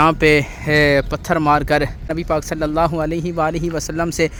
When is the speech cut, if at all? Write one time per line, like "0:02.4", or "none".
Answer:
none